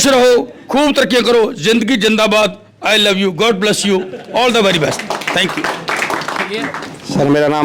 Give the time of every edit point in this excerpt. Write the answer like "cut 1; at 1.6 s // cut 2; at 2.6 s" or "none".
cut 1; at 6.7 s